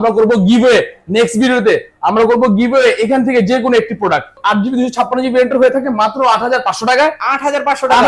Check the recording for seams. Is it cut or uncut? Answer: cut